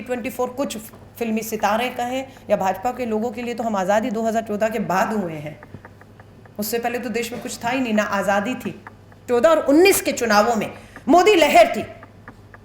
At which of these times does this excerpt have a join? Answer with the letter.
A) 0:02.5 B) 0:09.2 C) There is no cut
B